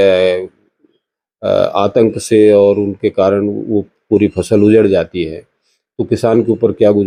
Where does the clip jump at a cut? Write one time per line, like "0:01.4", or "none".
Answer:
none